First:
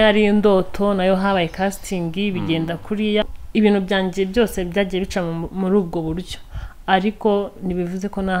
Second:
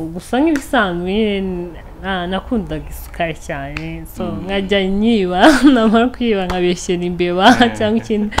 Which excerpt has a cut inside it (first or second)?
first